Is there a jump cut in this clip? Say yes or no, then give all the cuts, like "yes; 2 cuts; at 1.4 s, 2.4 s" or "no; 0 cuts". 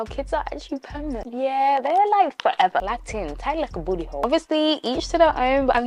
no; 0 cuts